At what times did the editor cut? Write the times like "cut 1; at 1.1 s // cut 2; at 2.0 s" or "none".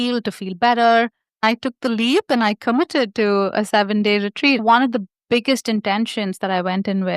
cut 1; at 1.4 s // cut 2; at 4.6 s